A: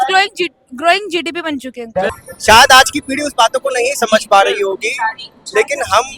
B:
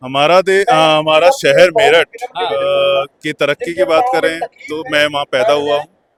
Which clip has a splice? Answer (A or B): A